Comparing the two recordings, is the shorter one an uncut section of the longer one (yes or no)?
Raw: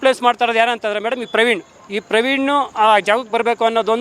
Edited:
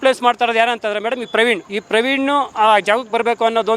no